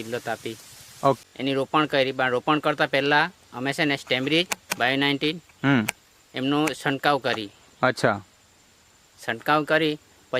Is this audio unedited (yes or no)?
no